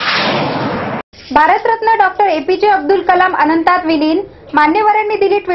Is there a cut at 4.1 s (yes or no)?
no